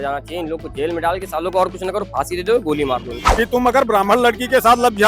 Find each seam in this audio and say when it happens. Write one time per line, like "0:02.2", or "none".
0:03.2